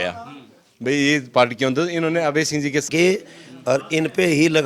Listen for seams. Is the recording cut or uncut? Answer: cut